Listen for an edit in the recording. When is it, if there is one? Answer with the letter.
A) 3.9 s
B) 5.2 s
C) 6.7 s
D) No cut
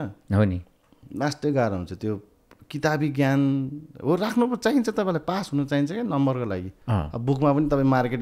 C